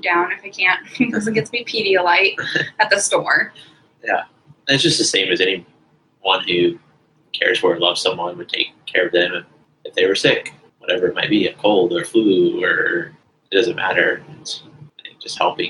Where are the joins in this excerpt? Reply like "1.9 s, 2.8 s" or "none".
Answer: none